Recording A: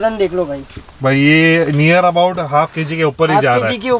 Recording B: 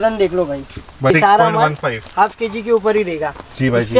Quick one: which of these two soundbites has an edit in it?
B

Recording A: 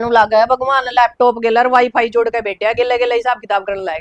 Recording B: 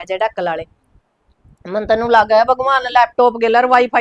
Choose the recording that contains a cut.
B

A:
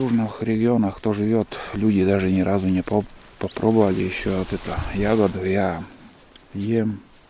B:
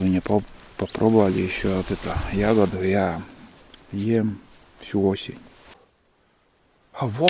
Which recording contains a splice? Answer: B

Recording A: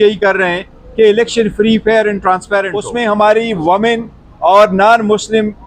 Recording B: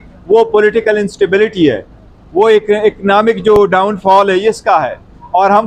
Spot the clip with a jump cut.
A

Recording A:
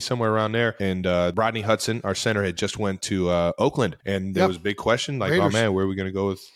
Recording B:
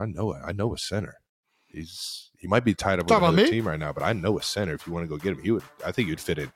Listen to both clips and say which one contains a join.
A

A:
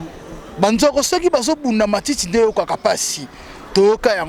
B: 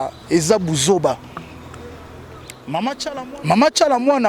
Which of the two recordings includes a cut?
B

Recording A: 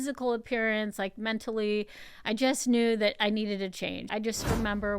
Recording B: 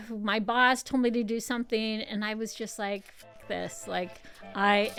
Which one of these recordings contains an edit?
A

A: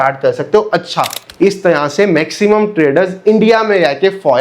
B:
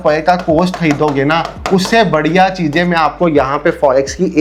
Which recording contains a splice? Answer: A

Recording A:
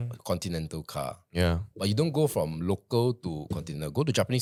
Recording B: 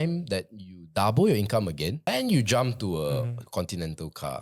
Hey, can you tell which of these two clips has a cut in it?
B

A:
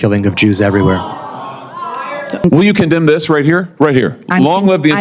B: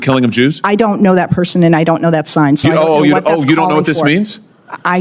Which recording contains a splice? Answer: A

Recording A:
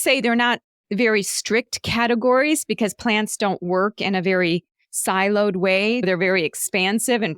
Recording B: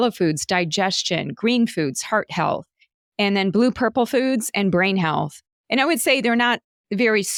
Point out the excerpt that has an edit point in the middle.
A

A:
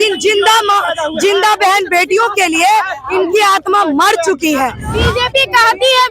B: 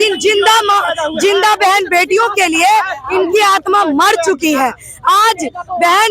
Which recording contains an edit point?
A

